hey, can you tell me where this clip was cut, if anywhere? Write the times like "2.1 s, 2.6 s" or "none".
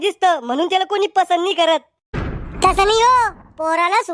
2.1 s